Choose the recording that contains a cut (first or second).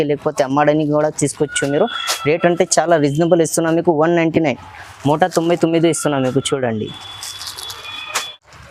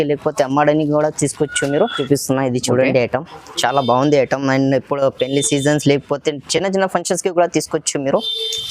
second